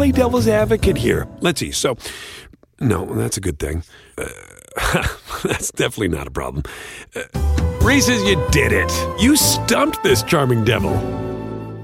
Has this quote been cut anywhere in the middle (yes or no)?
no